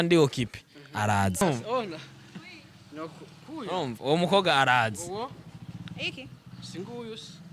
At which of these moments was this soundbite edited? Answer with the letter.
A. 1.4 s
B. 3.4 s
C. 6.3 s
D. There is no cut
A